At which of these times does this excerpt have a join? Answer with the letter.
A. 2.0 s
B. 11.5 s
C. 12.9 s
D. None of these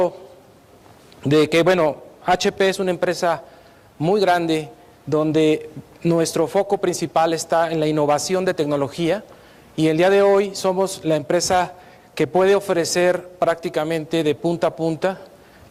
D